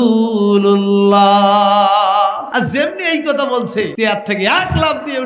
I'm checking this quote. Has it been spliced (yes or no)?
yes